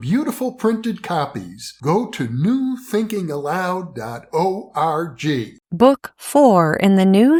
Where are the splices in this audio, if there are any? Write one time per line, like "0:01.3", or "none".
none